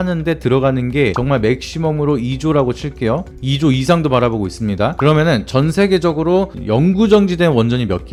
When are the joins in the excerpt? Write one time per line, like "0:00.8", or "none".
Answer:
none